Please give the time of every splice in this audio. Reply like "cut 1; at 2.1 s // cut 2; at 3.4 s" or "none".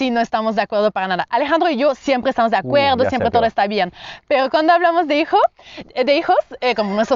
none